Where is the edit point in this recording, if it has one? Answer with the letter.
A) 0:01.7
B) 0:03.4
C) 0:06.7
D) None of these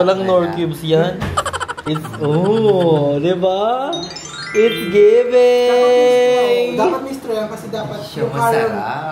A